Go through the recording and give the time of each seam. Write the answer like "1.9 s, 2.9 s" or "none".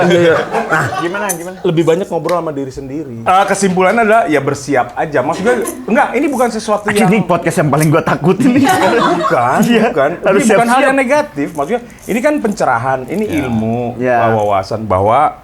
3.2 s